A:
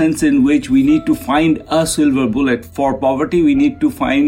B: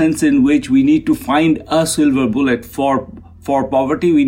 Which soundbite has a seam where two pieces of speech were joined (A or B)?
A